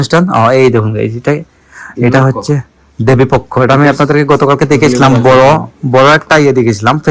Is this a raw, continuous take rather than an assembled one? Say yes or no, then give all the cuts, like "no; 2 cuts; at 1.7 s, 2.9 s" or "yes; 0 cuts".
yes; 0 cuts